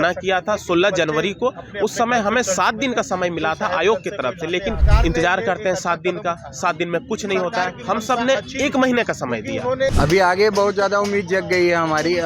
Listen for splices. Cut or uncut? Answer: cut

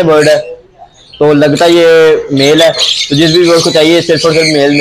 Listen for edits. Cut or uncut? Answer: uncut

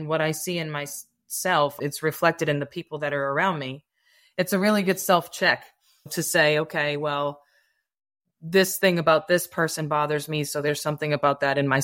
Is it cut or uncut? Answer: cut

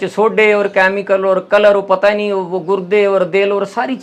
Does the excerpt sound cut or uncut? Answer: uncut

